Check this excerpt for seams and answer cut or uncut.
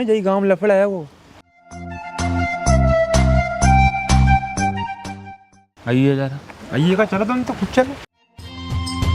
uncut